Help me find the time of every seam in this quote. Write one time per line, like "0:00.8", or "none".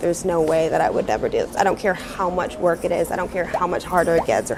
none